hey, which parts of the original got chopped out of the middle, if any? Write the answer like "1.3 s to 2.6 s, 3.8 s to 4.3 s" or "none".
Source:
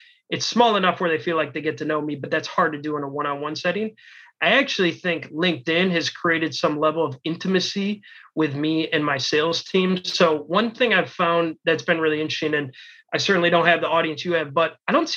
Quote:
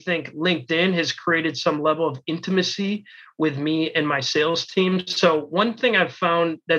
none